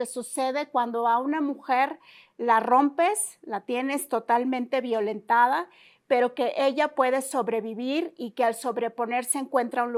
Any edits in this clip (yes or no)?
no